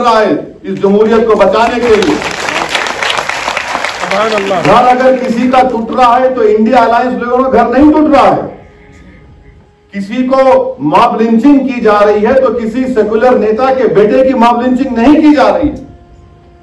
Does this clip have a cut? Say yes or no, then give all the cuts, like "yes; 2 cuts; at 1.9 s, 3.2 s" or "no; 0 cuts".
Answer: no; 0 cuts